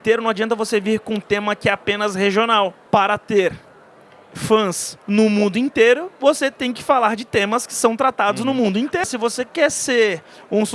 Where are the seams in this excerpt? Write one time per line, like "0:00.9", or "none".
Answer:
0:02.8
0:09.0